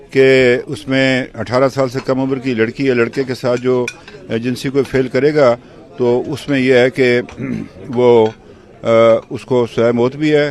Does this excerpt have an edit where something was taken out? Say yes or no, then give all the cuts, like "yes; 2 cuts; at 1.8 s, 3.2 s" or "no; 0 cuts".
no; 0 cuts